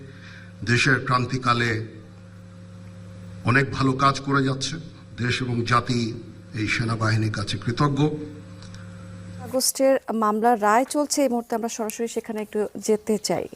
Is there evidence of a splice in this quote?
yes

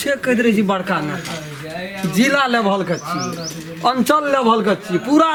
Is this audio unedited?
yes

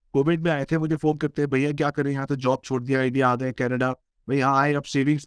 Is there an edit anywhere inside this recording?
no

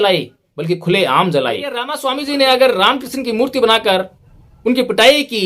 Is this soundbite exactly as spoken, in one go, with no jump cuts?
no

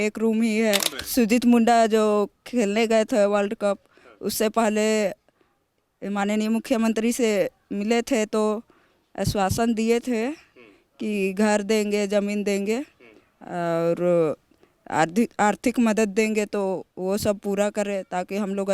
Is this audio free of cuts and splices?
no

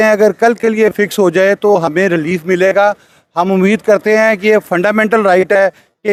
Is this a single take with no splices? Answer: yes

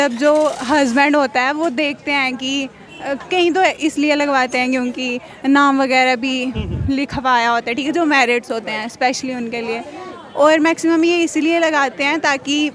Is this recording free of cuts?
yes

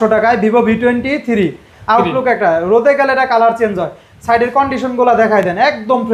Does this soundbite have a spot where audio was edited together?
no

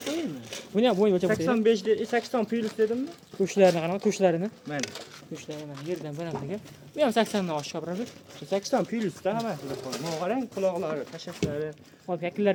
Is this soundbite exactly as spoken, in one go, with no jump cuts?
yes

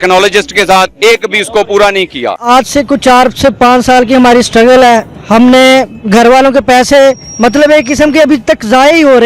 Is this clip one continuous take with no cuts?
no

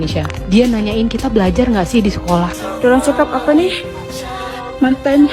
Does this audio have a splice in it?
yes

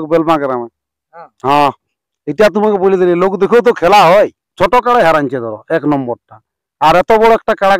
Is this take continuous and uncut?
no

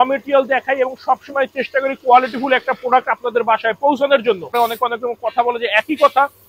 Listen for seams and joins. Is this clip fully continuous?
no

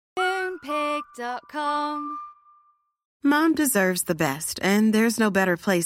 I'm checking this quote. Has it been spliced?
yes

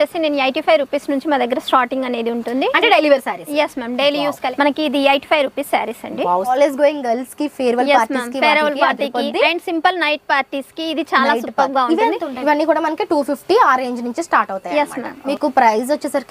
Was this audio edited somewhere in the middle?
yes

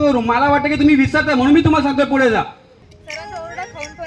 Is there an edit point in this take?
no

